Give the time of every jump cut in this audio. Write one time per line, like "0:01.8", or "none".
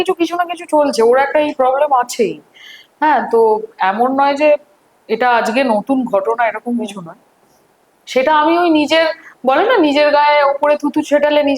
none